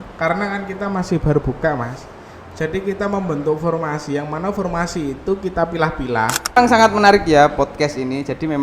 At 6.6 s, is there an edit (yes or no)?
yes